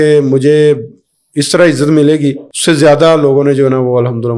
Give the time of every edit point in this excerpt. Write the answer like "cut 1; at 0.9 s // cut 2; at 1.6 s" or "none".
cut 1; at 2.5 s